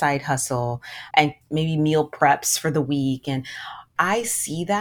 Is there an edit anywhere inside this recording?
yes; 1 cut; at 3.9 s

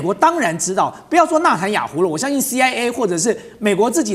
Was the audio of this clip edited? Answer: no; 0 cuts

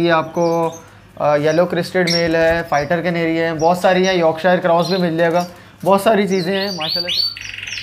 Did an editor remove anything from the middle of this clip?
yes; 1 cut; at 6.9 s

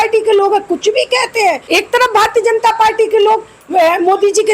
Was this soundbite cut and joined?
yes; 1 cut; at 1.6 s

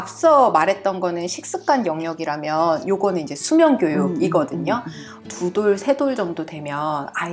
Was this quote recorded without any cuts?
yes; 0 cuts

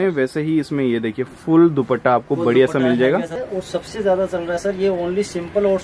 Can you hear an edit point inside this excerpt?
yes; 1 cut; at 3.4 s

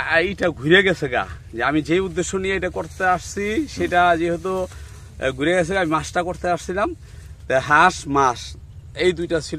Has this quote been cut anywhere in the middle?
no; 0 cuts

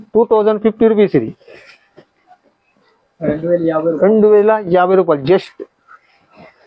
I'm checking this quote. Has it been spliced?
no; 0 cuts

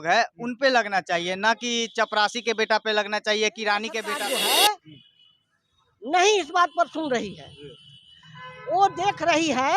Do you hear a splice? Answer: yes; 1 cut; at 4.0 s

